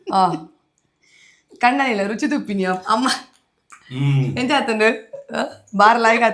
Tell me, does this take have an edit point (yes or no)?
no